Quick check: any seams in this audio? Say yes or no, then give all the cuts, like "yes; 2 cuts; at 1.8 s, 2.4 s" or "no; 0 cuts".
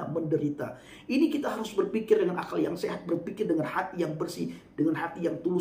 no; 0 cuts